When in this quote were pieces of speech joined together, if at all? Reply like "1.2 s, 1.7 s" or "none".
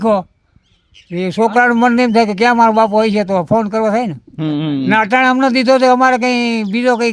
none